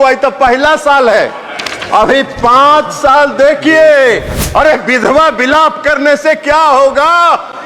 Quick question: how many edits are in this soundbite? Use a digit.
1